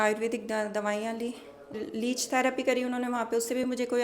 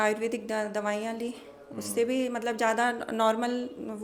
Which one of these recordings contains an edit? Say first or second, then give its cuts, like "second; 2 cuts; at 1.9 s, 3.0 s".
first; 1 cut; at 1.7 s